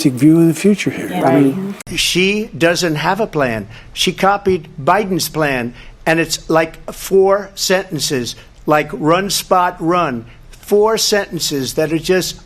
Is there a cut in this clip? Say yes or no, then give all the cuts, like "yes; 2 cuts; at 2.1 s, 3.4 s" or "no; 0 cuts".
yes; 1 cut; at 2.0 s